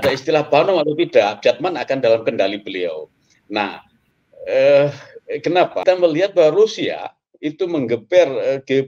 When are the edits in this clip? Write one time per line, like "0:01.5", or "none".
0:05.8

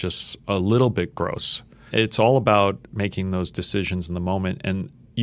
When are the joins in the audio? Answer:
0:01.9

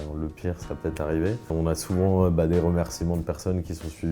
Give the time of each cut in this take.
0:01.5

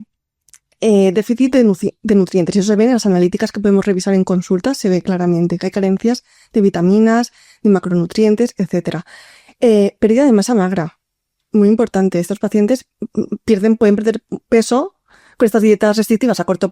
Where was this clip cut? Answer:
none

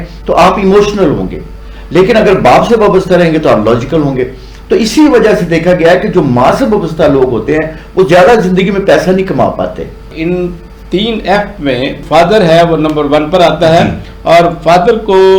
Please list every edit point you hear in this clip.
0:10.2
0:12.0

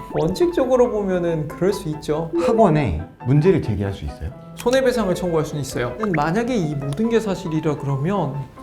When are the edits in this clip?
0:02.3
0:06.0

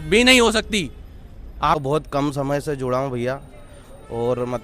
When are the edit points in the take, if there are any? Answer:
0:01.8

